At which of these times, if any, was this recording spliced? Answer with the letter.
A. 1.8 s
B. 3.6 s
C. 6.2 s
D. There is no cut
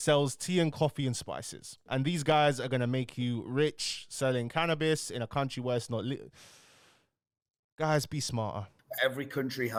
D